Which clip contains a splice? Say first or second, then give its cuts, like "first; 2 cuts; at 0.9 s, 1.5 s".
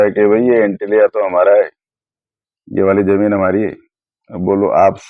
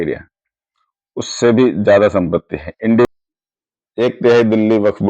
second; 1 cut; at 3.1 s